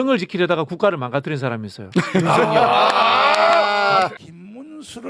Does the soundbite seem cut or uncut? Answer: cut